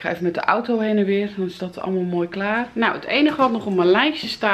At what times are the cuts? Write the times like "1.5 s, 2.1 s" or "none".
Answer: 2.7 s